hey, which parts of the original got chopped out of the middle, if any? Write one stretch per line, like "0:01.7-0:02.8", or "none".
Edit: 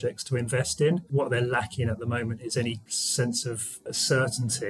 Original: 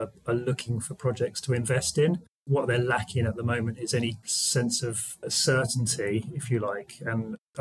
0:02.2-0:02.4